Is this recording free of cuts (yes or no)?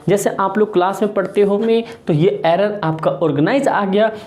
no